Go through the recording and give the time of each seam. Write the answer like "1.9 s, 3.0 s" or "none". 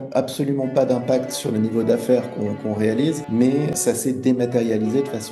1.4 s, 3.7 s